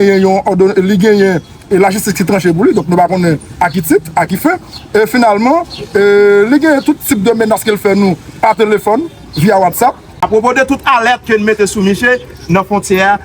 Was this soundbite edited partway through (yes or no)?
yes